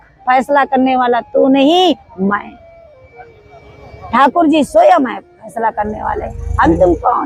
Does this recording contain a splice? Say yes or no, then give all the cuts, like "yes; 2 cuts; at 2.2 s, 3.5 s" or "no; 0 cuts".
no; 0 cuts